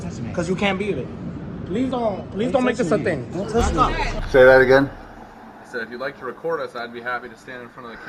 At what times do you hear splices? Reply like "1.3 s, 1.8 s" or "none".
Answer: 4.2 s

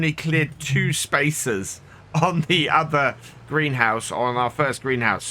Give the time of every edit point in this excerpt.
none

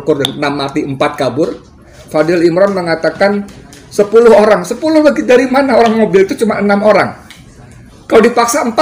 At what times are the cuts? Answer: 2.0 s

